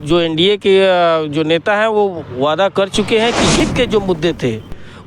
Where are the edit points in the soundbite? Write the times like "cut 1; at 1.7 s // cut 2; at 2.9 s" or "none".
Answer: cut 1; at 3.6 s